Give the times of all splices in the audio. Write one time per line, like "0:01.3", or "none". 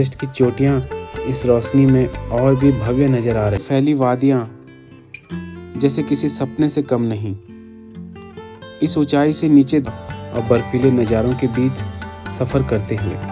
0:03.6
0:09.8